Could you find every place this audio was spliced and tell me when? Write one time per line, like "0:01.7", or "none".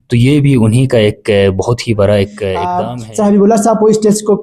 0:02.7